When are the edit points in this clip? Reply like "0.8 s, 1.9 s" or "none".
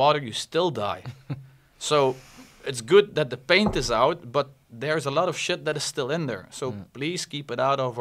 none